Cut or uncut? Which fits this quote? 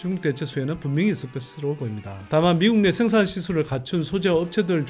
uncut